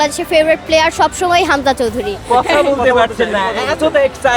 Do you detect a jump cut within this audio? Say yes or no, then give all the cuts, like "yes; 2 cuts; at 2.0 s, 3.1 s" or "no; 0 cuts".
yes; 1 cut; at 2.2 s